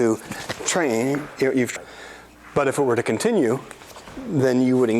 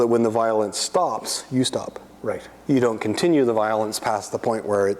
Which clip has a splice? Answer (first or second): first